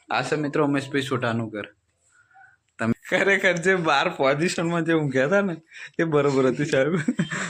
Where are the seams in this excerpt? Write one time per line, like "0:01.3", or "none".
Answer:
0:02.9